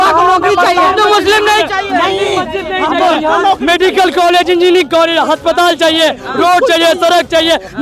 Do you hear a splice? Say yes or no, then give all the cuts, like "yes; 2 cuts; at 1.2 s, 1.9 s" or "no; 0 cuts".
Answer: no; 0 cuts